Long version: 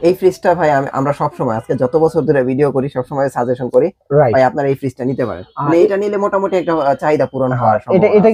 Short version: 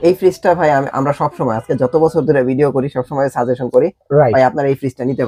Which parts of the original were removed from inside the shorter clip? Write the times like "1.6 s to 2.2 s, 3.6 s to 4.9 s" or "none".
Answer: none